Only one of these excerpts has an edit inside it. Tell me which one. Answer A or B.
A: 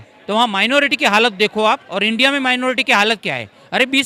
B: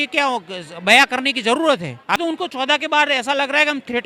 B